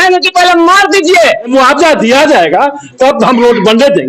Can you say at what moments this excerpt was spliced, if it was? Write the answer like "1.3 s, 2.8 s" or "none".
1.5 s